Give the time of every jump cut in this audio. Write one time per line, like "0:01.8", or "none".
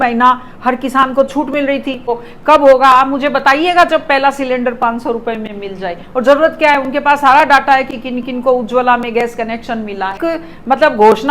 0:02.2
0:10.2

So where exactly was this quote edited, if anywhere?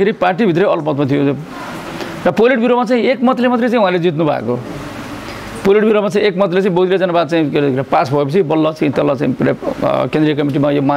none

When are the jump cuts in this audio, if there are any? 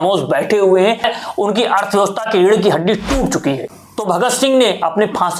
0:01.0
0:03.6

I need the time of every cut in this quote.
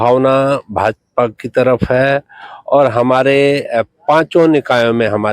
none

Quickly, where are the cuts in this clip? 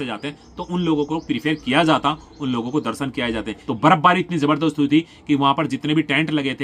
0:03.6

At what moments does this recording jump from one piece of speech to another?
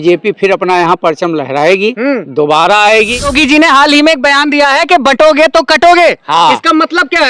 0:03.3

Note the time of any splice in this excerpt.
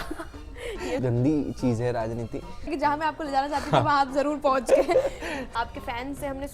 0:01.0
0:02.7
0:05.4

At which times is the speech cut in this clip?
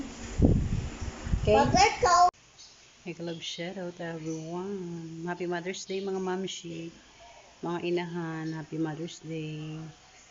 0:02.3

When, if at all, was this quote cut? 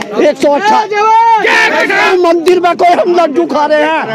0:02.1

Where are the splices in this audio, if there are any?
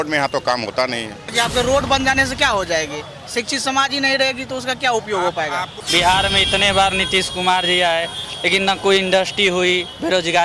0:01.3
0:05.8

